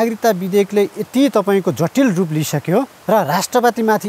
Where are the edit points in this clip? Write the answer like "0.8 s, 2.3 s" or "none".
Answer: 3.0 s